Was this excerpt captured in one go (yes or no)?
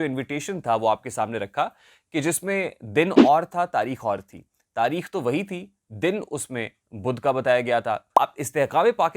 no